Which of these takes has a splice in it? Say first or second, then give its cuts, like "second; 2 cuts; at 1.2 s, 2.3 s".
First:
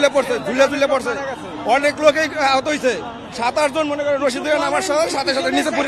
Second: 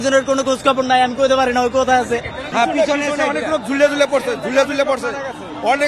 second; 1 cut; at 2.4 s